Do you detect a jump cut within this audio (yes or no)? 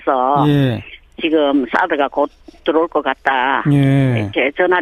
no